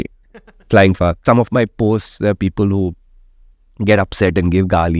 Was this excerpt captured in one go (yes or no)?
no